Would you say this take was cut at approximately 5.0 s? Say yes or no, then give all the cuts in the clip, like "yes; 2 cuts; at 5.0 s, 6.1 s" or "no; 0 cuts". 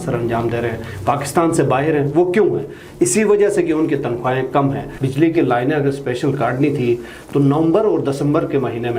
yes; 1 cut; at 5.0 s